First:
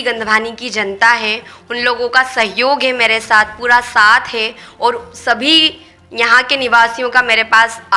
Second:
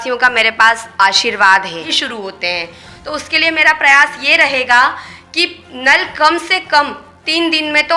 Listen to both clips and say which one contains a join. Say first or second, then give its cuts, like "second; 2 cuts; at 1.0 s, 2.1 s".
second; 1 cut; at 2.0 s